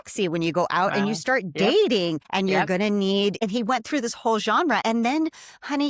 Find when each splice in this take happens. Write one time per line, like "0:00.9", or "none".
0:02.2
0:03.4
0:04.8